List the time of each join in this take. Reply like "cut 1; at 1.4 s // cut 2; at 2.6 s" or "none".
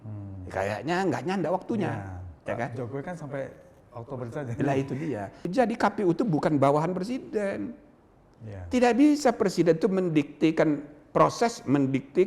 cut 1; at 5.5 s